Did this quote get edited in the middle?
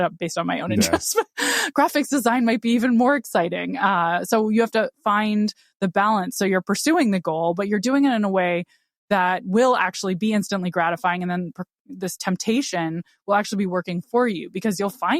no; 0 cuts

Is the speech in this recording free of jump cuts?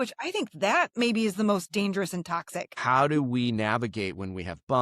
no; 1 cut; at 2.8 s

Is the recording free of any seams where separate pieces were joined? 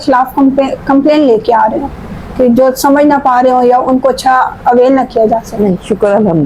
yes; 0 cuts

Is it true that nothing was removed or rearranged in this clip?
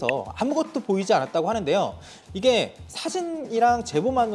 no; 1 cut; at 2.0 s

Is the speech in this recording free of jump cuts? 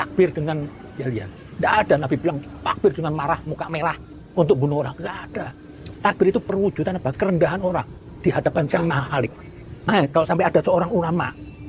no; 1 cut; at 10.3 s

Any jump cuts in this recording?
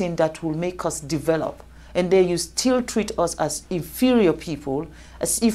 no; 0 cuts

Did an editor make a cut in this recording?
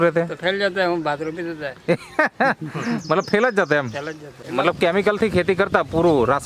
yes; 1 cut; at 4.4 s

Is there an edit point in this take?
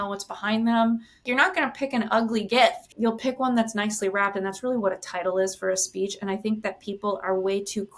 yes; 2 cuts; at 1.2 s, 2.9 s

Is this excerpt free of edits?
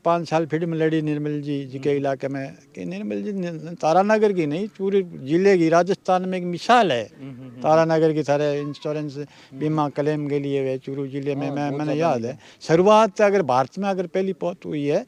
yes; 0 cuts

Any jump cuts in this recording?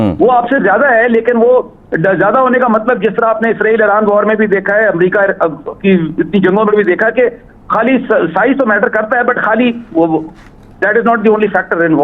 no; 0 cuts

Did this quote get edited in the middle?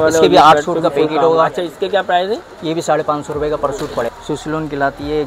yes; 1 cut; at 4.1 s

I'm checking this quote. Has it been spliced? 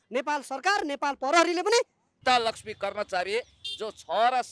yes; 1 cut; at 2.0 s

